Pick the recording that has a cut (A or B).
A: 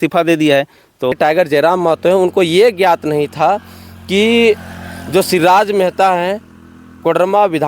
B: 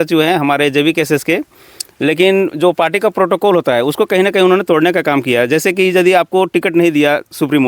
A